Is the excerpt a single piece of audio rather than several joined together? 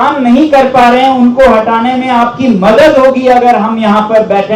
yes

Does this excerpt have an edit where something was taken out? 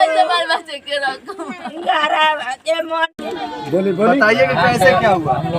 yes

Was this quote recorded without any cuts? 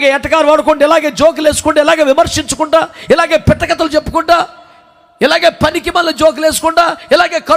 yes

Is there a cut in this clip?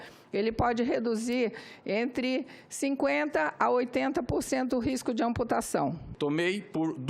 yes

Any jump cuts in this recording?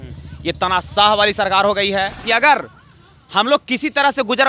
yes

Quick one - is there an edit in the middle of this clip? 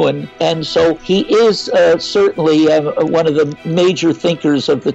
yes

